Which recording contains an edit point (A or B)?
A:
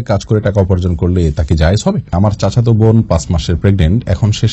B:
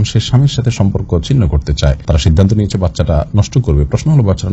A